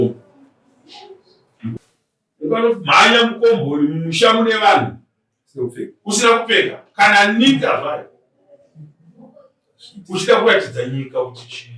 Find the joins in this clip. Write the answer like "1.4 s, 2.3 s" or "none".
1.8 s